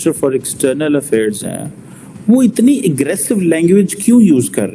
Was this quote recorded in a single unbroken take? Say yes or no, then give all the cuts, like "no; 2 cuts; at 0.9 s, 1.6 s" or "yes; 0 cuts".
yes; 0 cuts